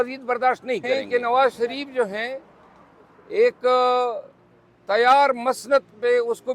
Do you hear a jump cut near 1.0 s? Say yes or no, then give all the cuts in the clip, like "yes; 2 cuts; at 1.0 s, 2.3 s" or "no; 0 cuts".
yes; 1 cut; at 1.0 s